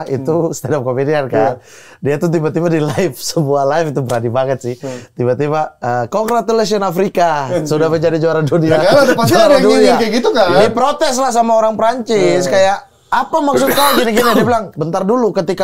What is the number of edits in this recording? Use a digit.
0